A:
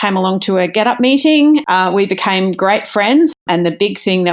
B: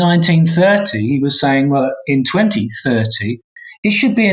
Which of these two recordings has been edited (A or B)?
A